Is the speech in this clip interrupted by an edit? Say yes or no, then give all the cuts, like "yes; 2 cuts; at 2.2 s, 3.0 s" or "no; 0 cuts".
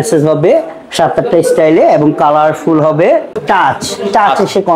yes; 1 cut; at 3.3 s